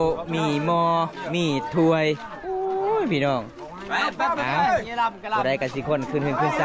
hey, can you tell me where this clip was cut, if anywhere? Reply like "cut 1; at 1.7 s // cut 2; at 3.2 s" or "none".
none